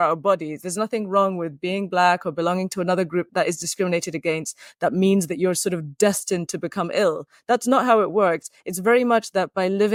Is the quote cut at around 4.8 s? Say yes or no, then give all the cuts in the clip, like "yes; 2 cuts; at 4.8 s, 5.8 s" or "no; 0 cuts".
no; 0 cuts